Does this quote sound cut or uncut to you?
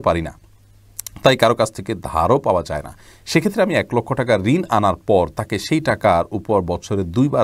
uncut